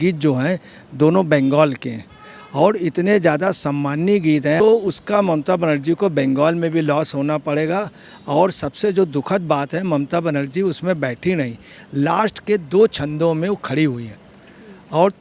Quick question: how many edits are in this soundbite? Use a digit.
1